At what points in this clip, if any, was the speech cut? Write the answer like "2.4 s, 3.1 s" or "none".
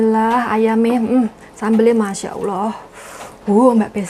none